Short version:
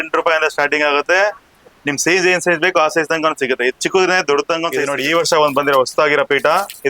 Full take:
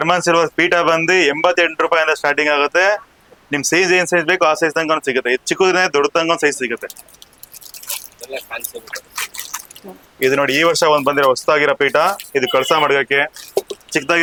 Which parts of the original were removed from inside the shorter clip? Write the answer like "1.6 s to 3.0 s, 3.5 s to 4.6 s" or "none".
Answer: 6.5 s to 10.3 s